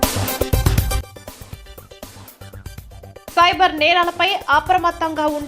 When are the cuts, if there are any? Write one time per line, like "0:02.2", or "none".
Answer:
0:01.0
0:02.2